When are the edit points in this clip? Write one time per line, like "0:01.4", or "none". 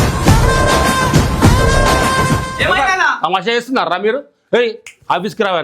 0:02.5